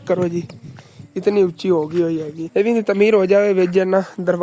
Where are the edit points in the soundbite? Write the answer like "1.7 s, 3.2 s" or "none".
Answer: 2.4 s